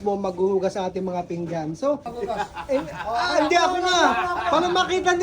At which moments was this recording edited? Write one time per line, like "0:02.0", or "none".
0:02.1